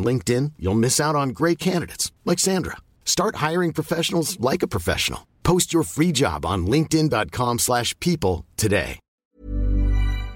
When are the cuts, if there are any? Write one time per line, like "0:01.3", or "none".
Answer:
0:09.3